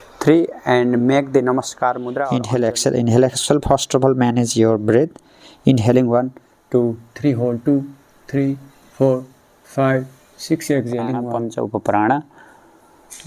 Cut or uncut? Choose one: cut